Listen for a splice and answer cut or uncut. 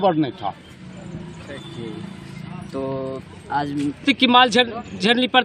cut